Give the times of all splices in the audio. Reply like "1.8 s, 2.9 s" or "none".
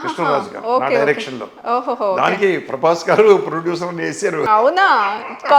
4.5 s